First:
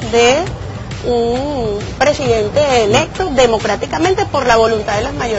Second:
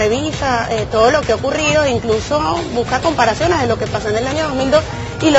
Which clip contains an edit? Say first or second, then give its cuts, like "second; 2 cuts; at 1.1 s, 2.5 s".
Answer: first; 1 cut; at 2.9 s